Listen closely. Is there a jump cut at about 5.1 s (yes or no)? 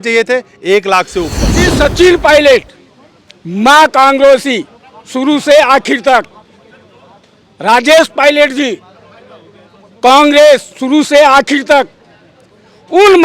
no